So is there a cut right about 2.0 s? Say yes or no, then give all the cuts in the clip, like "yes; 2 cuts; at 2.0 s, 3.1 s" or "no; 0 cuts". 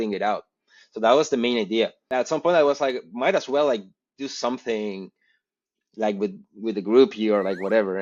yes; 1 cut; at 2.0 s